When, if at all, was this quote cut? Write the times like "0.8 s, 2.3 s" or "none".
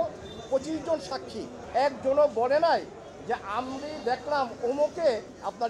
1.6 s